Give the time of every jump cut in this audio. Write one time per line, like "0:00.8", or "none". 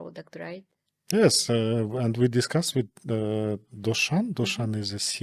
none